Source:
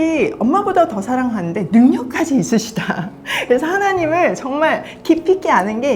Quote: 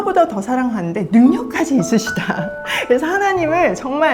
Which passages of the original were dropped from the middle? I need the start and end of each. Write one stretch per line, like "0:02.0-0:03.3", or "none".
none